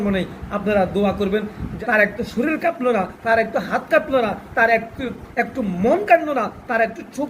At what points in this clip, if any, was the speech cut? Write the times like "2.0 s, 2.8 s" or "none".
1.7 s